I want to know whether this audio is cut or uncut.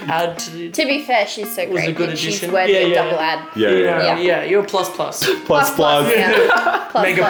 uncut